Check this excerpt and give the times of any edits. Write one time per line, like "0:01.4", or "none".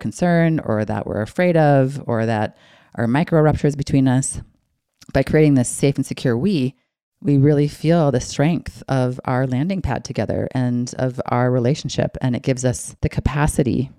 0:12.9